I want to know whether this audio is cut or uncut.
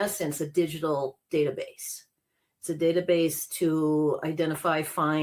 uncut